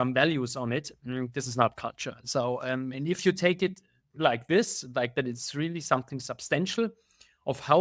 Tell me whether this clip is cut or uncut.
uncut